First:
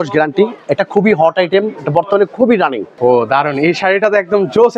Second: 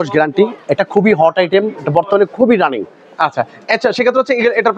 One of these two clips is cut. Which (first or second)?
first